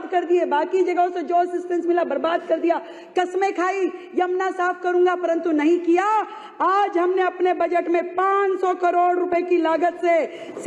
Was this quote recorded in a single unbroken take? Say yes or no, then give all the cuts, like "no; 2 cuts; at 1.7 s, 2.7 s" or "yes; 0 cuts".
yes; 0 cuts